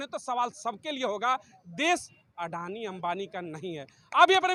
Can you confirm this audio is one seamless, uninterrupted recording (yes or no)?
yes